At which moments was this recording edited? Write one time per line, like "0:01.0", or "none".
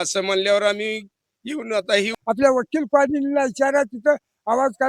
0:02.2